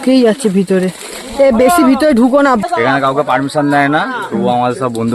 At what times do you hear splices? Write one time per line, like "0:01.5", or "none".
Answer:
0:02.6